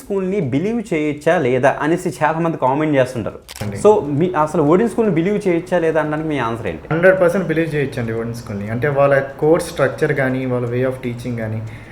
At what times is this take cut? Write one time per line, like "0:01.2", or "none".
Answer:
0:03.7
0:06.9